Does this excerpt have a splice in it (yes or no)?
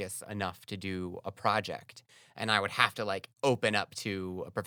no